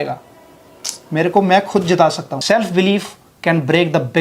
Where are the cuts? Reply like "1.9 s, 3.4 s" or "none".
2.3 s